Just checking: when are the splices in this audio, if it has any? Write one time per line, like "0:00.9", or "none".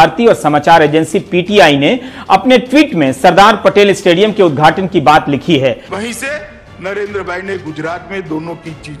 0:05.9